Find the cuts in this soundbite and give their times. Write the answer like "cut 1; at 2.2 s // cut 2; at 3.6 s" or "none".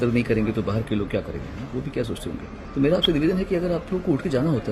cut 1; at 2.6 s